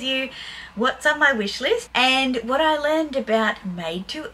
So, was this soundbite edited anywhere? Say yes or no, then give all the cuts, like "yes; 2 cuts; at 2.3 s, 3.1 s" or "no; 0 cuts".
yes; 1 cut; at 1.9 s